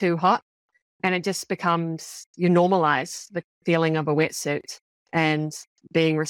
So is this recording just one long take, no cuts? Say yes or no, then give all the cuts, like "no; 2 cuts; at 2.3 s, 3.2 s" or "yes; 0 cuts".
yes; 0 cuts